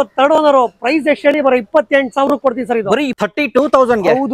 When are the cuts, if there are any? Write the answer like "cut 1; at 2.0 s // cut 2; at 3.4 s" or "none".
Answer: cut 1; at 3.1 s